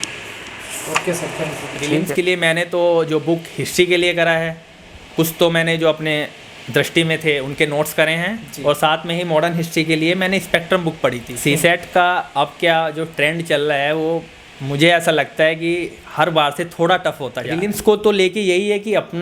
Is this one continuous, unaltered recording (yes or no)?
no